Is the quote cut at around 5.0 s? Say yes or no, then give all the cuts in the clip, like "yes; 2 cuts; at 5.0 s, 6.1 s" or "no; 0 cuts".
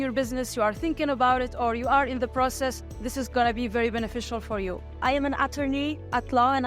yes; 1 cut; at 5.0 s